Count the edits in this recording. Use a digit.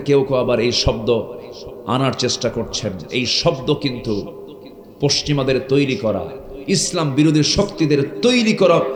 0